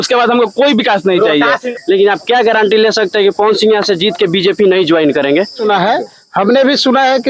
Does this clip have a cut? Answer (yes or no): yes